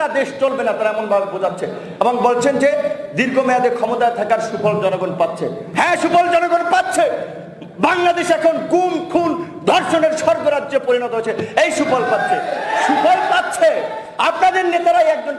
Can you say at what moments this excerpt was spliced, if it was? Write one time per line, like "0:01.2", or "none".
none